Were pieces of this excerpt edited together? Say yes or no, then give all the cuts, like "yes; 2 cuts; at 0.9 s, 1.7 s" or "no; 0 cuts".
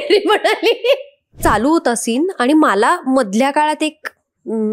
yes; 1 cut; at 1.4 s